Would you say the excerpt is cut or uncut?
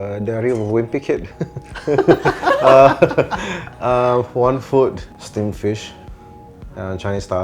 cut